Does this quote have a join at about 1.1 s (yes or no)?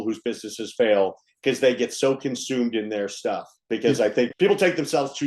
no